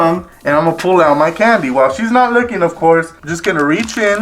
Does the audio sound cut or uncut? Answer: cut